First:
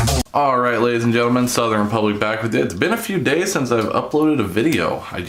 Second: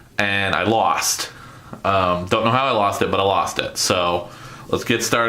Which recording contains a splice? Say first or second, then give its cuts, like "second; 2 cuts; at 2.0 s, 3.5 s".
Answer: second; 1 cut; at 2.6 s